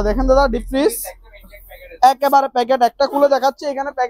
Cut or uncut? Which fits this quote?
uncut